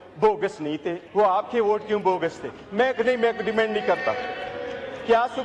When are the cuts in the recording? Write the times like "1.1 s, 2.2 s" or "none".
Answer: 1.0 s